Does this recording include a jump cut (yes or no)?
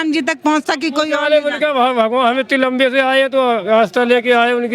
no